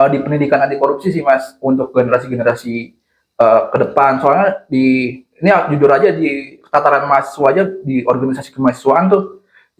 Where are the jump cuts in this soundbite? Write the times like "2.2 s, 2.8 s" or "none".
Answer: none